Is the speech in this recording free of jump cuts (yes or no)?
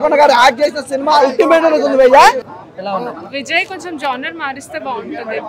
no